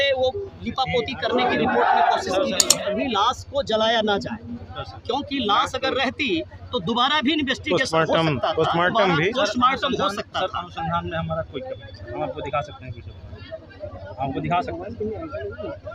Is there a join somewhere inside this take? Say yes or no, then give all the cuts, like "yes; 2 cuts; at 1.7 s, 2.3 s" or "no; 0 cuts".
yes; 1 cut; at 2.7 s